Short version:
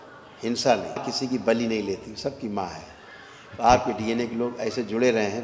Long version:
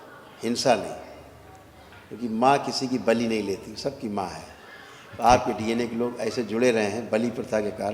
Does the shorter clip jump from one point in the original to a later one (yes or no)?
yes